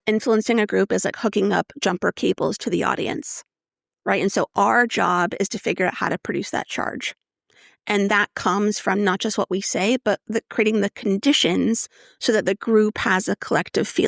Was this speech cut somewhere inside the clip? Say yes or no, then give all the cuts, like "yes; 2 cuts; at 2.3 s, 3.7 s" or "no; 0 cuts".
no; 0 cuts